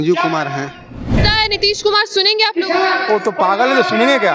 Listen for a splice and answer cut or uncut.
cut